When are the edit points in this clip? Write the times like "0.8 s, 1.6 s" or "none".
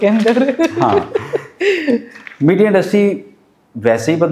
none